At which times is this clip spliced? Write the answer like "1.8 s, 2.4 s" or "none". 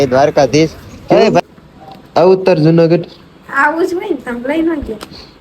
1.4 s